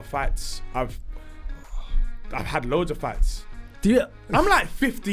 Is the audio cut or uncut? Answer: uncut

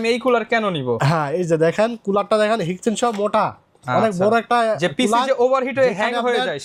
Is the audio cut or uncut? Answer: uncut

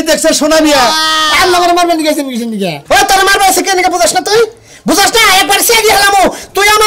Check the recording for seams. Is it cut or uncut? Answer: cut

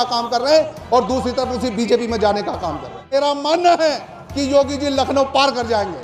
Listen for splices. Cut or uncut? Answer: cut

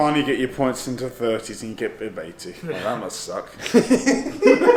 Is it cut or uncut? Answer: uncut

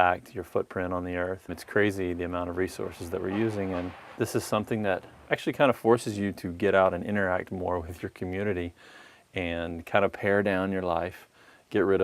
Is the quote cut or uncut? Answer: cut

